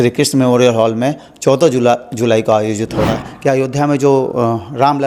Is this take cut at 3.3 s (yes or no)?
yes